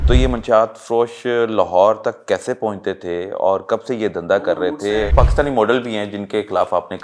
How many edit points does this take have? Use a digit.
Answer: 1